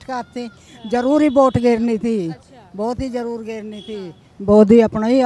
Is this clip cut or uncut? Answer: uncut